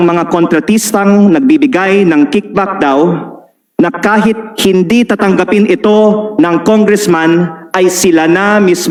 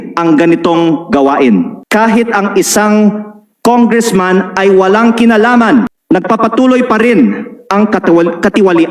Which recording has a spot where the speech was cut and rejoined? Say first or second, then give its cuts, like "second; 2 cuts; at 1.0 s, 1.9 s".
second; 2 cuts; at 1.8 s, 6.0 s